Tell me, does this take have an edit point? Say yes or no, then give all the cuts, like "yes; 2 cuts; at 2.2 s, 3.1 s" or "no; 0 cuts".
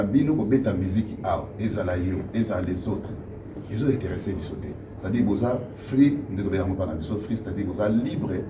no; 0 cuts